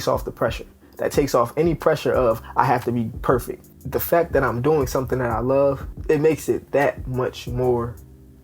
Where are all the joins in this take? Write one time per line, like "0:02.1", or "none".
0:03.8